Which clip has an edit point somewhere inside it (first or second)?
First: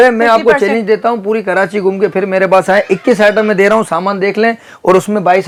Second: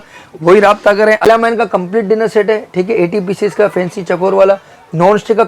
second